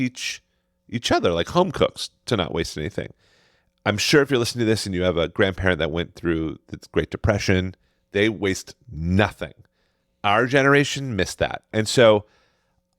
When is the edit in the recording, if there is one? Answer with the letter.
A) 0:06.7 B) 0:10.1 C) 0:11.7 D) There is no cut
C